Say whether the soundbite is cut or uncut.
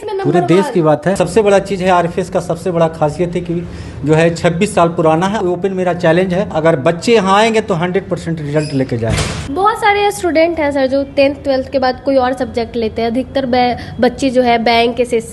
cut